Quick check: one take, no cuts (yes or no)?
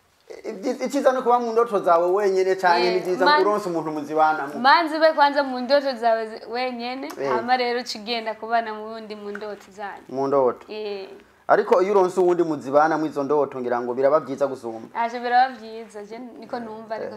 yes